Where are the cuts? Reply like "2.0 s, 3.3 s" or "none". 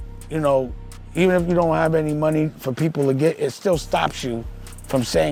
none